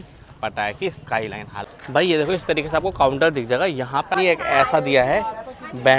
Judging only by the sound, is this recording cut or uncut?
cut